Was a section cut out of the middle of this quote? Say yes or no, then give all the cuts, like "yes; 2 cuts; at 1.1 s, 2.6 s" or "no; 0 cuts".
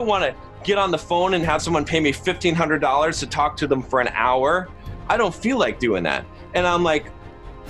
no; 0 cuts